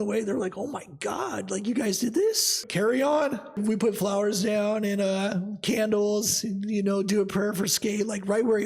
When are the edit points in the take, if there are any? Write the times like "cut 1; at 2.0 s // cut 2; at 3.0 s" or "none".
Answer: cut 1; at 2.6 s // cut 2; at 3.6 s

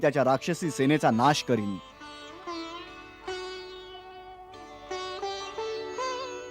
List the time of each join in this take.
none

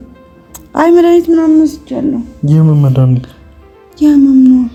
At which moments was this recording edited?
none

